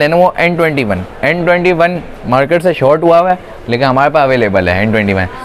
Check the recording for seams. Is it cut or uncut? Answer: uncut